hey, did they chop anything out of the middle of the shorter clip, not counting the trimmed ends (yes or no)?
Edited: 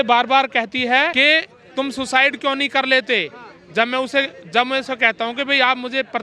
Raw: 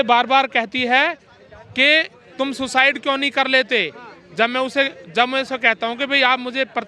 yes